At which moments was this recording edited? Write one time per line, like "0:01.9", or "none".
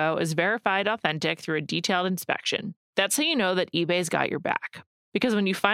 none

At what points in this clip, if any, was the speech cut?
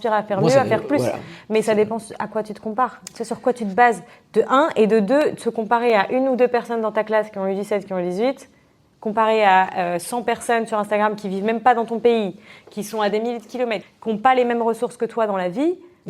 0:13.9

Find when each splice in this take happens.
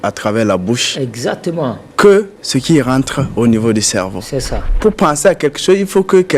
0:01.8
0:02.4
0:04.6

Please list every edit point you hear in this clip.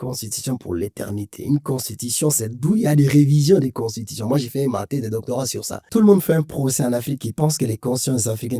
0:05.8

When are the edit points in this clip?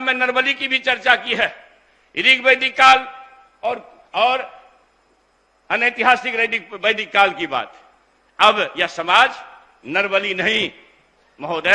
none

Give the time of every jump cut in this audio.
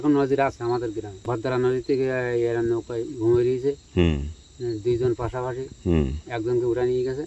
0:01.1

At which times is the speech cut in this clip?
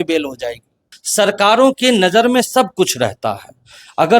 0:01.0

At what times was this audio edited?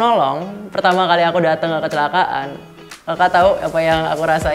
none

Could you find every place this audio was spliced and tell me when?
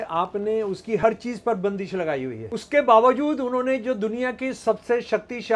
0:02.5

